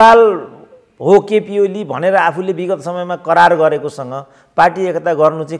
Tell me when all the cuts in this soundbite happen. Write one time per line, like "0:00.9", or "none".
none